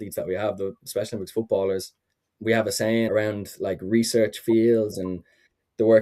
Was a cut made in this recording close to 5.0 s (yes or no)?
no